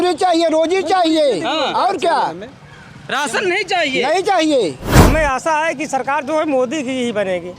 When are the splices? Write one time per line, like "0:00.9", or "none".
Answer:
0:04.9